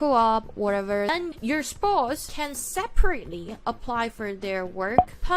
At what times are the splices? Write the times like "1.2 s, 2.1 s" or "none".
1.1 s, 2.3 s